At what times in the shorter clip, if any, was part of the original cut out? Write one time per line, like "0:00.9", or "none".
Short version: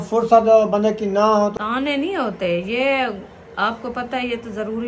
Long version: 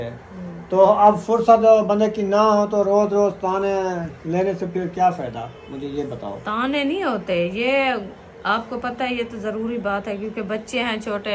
0:01.5

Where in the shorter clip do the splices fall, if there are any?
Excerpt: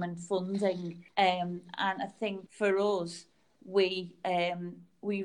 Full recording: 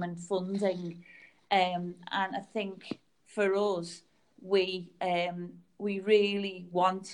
0:00.9
0:02.4

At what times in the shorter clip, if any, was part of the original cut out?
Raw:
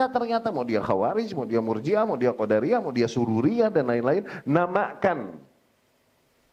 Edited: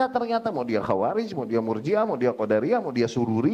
none

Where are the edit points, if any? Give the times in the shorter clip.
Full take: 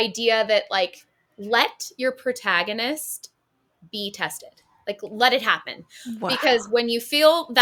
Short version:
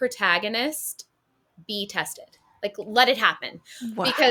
none

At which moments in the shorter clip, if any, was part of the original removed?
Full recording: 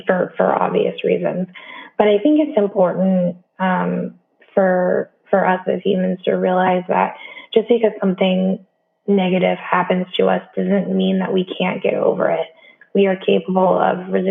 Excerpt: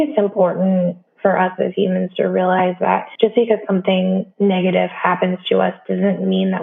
0:01.1
0:03.1
0:04.3

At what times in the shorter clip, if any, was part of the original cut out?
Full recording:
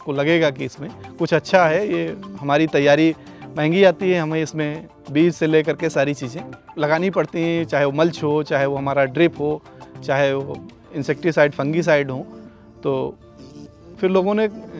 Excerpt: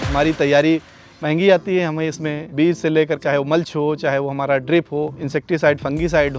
0:02.4
0:03.2
0:05.2

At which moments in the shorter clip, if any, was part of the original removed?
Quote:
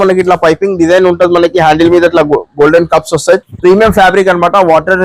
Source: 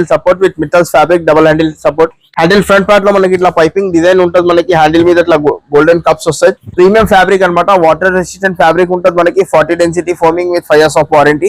none

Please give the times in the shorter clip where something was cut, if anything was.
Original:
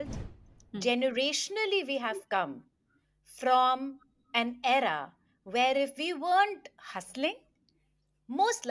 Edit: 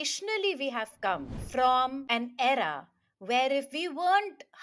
0:01.4
0:02.0

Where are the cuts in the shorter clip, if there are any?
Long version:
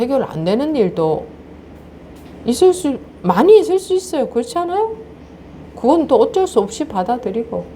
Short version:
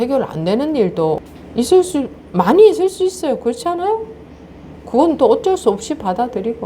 0:01.4

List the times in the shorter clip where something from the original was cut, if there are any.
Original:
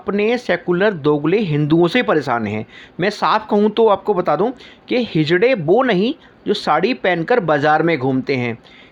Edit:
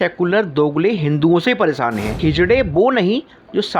0:02.2

